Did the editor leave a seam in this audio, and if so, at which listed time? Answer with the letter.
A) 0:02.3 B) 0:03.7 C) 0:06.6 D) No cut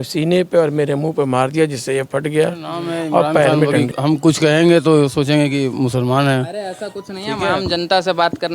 B